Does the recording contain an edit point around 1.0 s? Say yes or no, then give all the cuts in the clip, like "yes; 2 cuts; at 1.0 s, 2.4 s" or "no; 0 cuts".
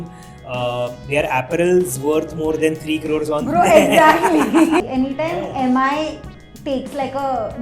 no; 1 cut; at 4.8 s